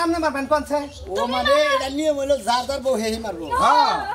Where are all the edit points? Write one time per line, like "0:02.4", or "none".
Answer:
none